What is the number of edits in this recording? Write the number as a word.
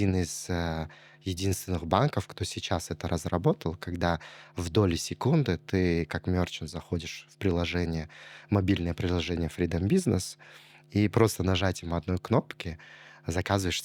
zero